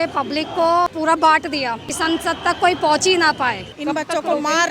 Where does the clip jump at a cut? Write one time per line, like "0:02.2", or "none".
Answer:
0:00.9
0:01.9
0:03.7